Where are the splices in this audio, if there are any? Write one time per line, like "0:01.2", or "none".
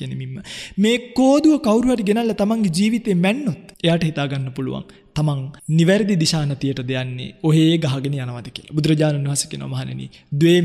0:03.7
0:05.5